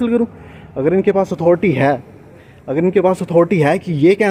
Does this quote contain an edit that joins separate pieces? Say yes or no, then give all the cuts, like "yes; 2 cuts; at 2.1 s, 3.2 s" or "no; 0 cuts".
no; 0 cuts